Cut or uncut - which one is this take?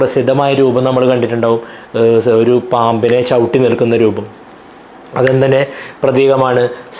uncut